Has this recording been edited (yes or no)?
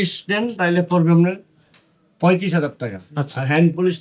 no